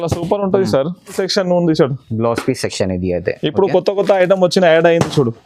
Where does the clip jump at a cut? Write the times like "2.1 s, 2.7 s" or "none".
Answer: 1.2 s